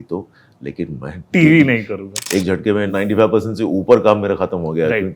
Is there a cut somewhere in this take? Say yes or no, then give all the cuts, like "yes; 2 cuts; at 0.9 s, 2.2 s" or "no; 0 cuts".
yes; 2 cuts; at 1.2 s, 2.5 s